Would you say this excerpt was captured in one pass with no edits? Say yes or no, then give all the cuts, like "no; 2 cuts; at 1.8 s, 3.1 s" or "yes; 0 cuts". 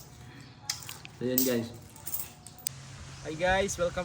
no; 1 cut; at 2.8 s